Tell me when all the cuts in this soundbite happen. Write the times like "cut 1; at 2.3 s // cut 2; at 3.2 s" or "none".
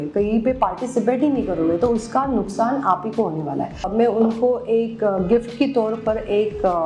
cut 1; at 3.8 s